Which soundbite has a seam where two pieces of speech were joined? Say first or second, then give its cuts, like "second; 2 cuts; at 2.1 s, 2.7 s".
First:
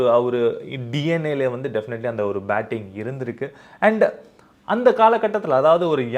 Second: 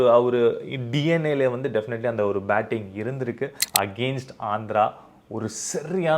second; 1 cut; at 3.6 s